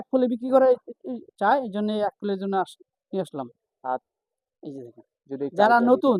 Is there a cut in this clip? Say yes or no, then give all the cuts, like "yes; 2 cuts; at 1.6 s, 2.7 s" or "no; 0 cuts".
yes; 1 cut; at 4.1 s